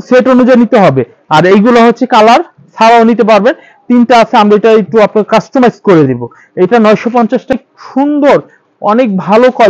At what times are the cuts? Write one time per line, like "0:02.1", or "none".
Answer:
0:07.5